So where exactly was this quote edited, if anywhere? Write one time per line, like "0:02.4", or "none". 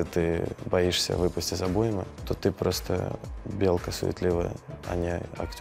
0:02.2